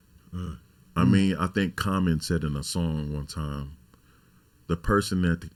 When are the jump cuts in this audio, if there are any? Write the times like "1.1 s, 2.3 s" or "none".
none

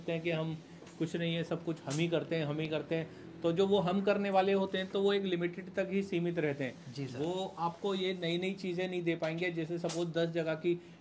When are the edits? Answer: none

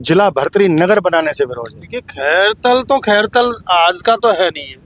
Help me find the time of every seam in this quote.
none

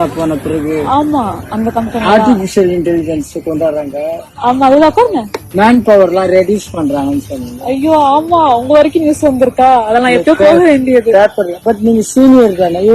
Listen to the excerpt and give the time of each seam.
none

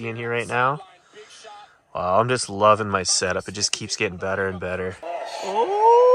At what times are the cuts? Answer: none

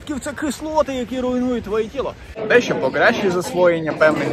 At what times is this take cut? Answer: 2.3 s

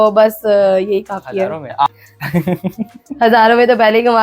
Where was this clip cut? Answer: 1.9 s

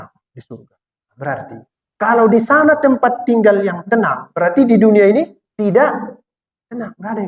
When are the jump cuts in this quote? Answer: 1.8 s, 5.4 s

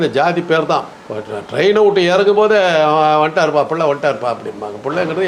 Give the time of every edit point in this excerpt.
none

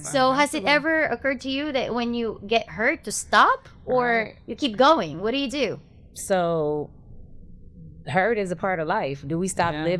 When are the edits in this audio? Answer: none

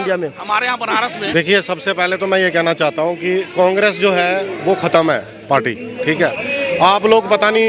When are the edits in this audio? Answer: 1.2 s

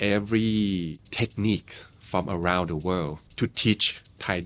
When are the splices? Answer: 1.0 s, 3.2 s

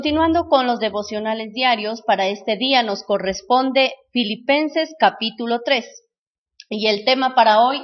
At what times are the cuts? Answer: none

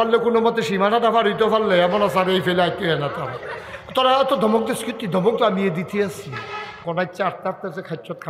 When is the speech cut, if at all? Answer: 6.8 s

